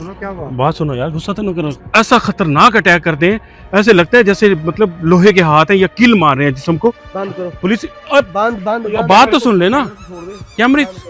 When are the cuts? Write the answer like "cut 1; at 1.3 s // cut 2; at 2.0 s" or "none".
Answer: cut 1; at 1.8 s // cut 2; at 7.1 s

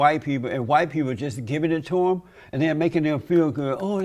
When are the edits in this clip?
none

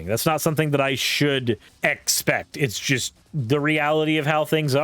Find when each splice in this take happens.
cut 1; at 1.7 s // cut 2; at 3.2 s

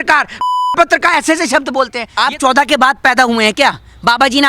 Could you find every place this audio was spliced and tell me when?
cut 1; at 2.0 s

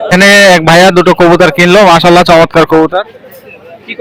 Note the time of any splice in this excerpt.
none

